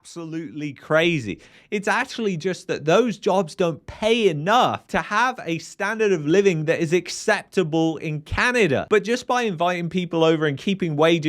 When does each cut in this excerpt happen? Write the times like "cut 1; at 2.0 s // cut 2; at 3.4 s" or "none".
cut 1; at 1.6 s